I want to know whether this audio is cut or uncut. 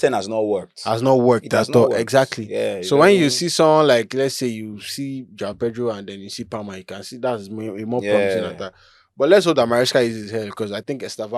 uncut